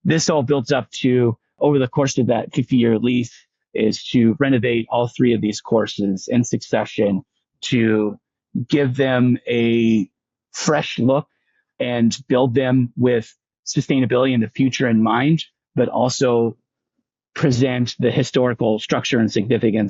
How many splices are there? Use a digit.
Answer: 2